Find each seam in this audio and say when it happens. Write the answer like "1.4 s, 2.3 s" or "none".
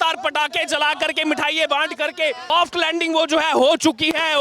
2.5 s

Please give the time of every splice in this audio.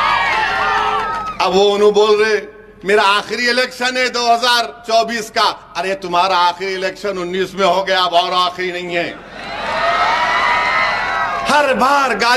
11.4 s

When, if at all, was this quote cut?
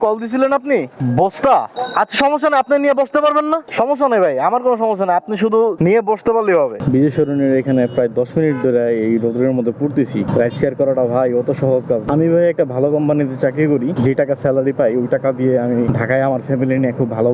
0.9 s, 1.8 s, 3.7 s, 6.8 s, 10.3 s, 12.0 s, 13.9 s, 15.9 s

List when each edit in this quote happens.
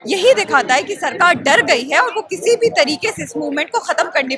none

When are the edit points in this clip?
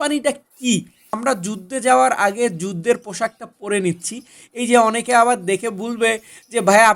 1.1 s

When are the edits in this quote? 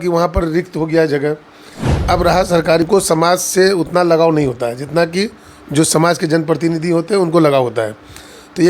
2.9 s

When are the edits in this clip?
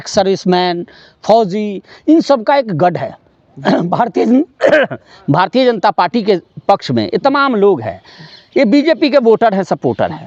none

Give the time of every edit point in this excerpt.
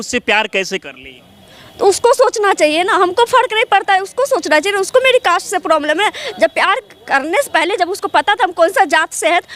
none

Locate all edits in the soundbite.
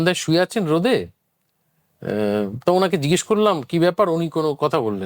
none

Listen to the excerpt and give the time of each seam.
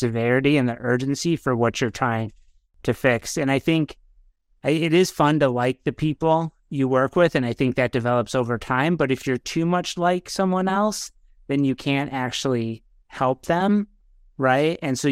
none

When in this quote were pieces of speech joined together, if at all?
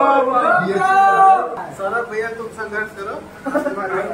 1.7 s

